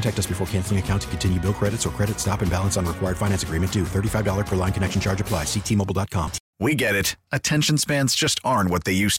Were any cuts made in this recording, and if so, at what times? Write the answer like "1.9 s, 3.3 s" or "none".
6.4 s

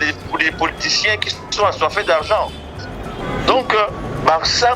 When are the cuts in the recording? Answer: 3.2 s

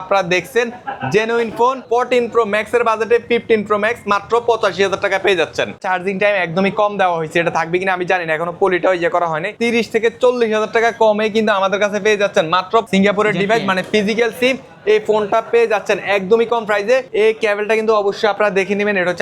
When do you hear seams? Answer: 1.8 s, 5.8 s, 9.5 s, 12.8 s, 17.1 s

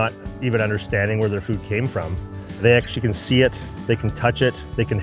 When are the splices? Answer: none

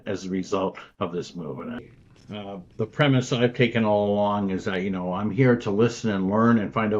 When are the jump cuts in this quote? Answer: 1.8 s

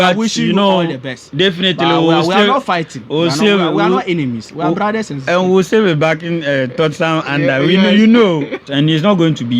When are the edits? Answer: 8.6 s

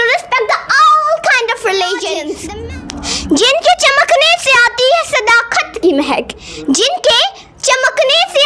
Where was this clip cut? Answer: 2.3 s

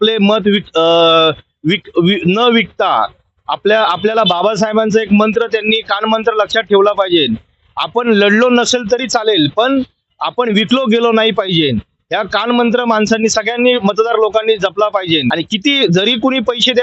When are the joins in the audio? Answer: 15.3 s

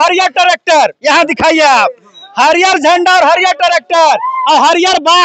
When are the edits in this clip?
none

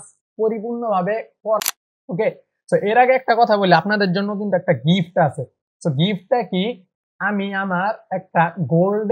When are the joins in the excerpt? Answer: 1.6 s

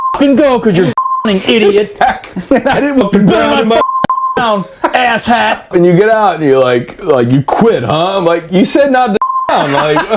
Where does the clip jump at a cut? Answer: 3.0 s, 5.7 s

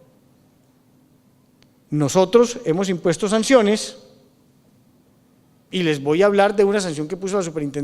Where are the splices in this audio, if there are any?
6.8 s

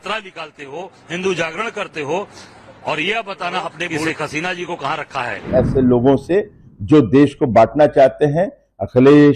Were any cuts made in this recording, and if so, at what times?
4.1 s, 5.5 s

